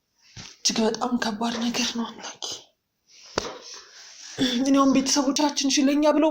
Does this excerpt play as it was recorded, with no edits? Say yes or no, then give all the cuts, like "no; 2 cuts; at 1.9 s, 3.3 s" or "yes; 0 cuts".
yes; 0 cuts